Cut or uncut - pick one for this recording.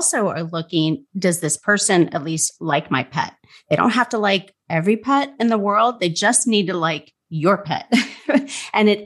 uncut